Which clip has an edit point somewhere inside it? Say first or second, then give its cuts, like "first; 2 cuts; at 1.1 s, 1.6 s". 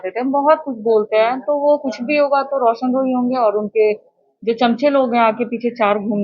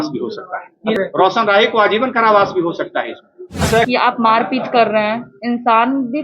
second; 2 cuts; at 1.0 s, 3.9 s